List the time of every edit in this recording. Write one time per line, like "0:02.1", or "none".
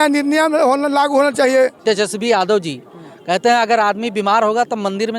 0:01.8

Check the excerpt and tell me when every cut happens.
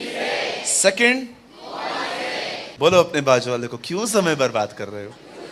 0:02.6

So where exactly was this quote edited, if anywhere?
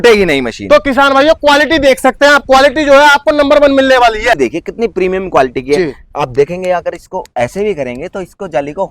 0:04.3

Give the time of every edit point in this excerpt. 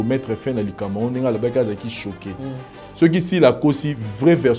0:02.8

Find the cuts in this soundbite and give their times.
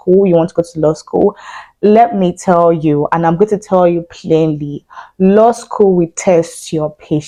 none

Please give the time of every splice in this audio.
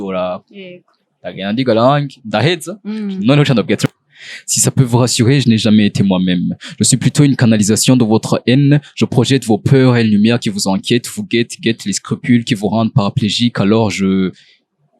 0:03.8

